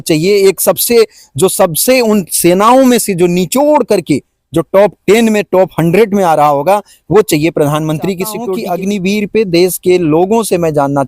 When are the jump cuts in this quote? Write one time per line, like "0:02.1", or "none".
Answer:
0:08.5